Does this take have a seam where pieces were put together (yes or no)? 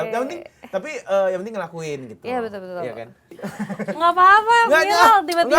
yes